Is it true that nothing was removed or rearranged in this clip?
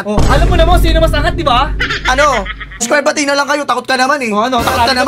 no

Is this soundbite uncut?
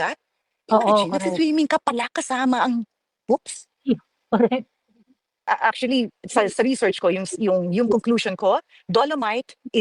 no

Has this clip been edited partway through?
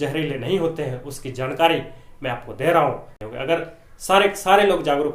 yes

